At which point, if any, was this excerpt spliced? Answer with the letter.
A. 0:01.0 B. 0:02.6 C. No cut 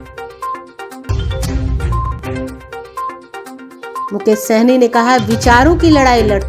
C